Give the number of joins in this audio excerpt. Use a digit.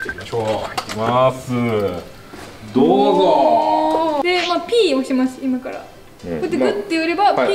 1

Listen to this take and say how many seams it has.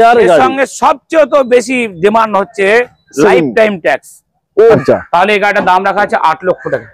1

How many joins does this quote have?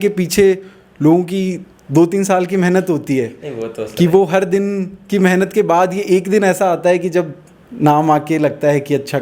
0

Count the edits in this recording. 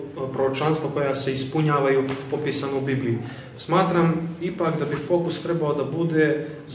0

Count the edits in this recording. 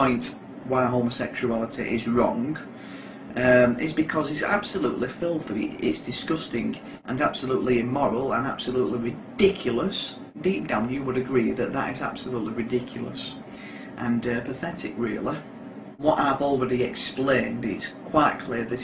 3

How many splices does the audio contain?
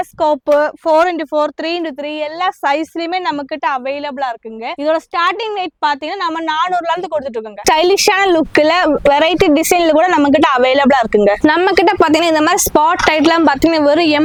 0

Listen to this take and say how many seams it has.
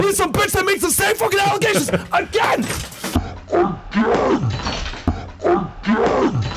1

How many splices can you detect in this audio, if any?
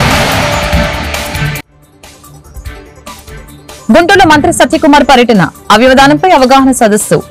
0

